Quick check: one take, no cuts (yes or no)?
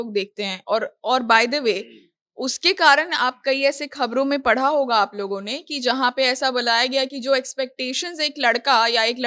yes